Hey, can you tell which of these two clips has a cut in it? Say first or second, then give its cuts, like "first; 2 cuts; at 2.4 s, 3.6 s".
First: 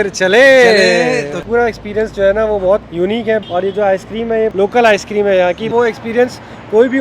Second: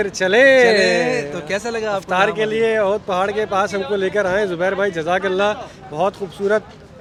first; 4 cuts; at 1.4 s, 3.2 s, 4.5 s, 5.7 s